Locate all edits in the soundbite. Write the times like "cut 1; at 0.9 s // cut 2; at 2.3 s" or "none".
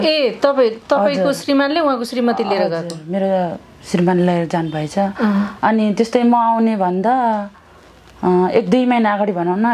none